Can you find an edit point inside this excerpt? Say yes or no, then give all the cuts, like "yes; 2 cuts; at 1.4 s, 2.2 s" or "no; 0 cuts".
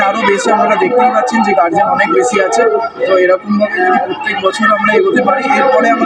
no; 0 cuts